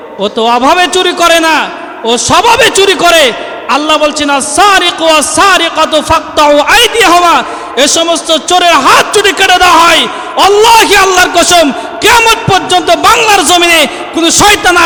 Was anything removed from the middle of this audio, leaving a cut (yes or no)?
no